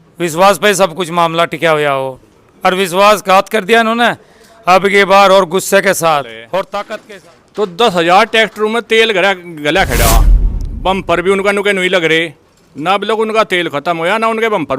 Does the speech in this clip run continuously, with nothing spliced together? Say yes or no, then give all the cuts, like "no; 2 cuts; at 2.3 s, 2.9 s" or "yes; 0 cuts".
no; 1 cut; at 6.9 s